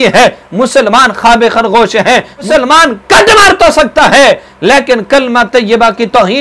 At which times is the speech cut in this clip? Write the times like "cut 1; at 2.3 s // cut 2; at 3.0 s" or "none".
cut 1; at 2.5 s